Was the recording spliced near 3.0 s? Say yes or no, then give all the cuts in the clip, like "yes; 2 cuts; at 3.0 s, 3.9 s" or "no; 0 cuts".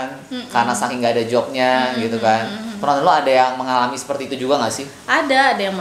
no; 0 cuts